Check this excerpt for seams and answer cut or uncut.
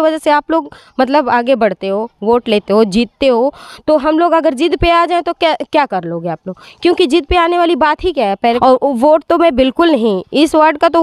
cut